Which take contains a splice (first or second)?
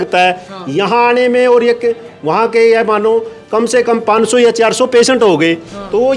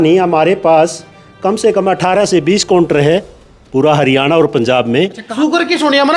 second